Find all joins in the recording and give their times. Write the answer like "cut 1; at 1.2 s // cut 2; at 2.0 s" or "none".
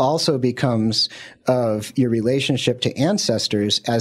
none